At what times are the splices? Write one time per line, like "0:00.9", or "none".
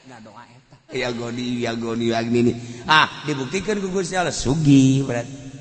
0:00.9